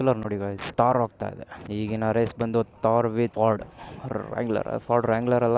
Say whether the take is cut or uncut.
uncut